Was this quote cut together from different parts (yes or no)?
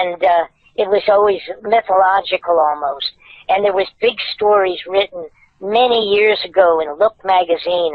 no